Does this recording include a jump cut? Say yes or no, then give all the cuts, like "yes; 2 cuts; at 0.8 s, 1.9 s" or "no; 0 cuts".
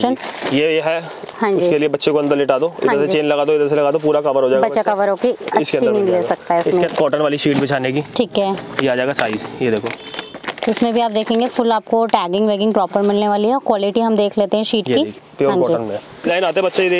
yes; 3 cuts; at 6.9 s, 15.2 s, 16.3 s